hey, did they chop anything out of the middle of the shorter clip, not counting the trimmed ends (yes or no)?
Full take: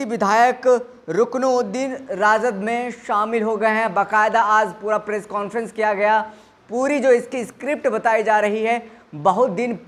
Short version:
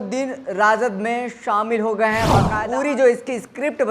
yes